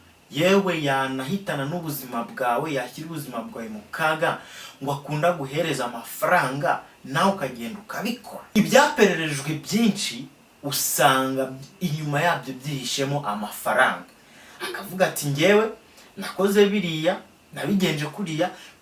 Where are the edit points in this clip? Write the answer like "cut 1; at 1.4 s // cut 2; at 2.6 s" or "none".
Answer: cut 1; at 8.4 s